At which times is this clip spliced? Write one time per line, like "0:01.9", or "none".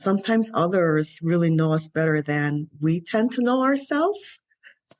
none